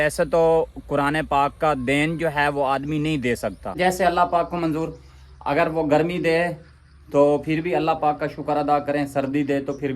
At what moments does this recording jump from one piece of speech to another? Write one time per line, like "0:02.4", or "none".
0:03.6